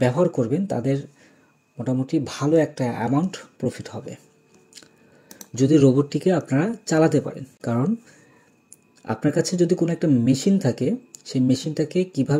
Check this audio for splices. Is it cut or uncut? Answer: uncut